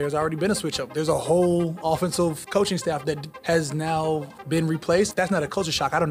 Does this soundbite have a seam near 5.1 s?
yes; 3 cuts; at 3.3 s, 4.3 s, 5.1 s

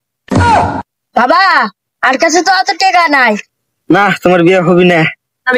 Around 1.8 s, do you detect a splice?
no; 1 cut; at 3.5 s

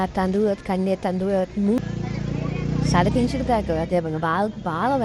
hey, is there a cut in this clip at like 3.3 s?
no; 1 cut; at 1.9 s

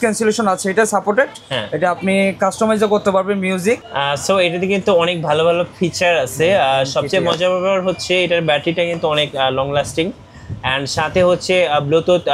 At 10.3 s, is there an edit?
no; 1 cut; at 3.9 s

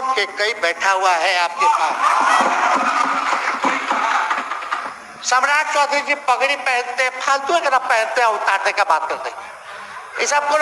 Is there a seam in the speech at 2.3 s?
yes; 1 cut; at 2.3 s

